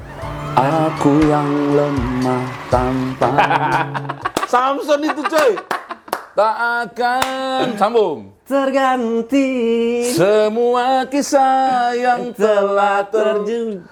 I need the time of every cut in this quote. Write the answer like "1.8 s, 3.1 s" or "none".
none